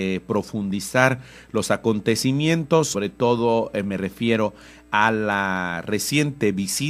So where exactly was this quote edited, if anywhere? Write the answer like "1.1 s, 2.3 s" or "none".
5.7 s